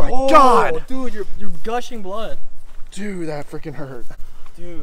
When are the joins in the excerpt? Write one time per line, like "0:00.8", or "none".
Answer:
none